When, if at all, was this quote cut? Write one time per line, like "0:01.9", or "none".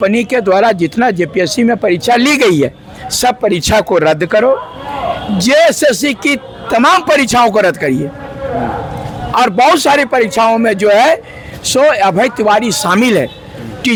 none